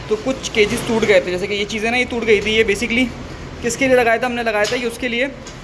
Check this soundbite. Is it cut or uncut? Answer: uncut